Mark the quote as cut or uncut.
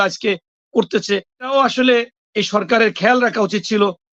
cut